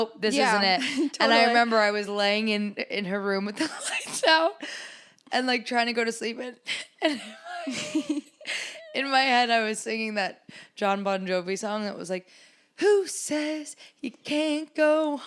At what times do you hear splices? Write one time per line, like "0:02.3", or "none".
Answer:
none